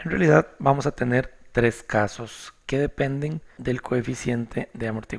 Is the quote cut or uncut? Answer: cut